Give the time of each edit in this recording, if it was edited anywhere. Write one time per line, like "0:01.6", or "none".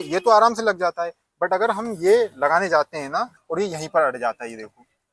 0:03.4